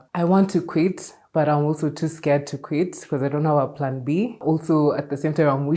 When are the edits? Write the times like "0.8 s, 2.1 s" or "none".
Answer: none